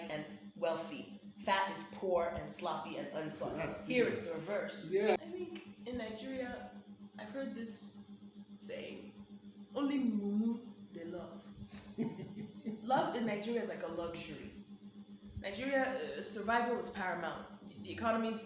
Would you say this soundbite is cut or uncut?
cut